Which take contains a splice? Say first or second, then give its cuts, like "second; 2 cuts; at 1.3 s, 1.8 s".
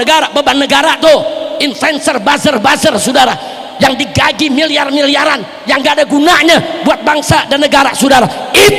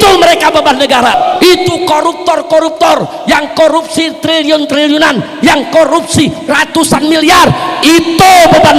second; 1 cut; at 1.1 s